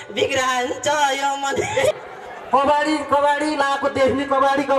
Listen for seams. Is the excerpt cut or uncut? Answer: cut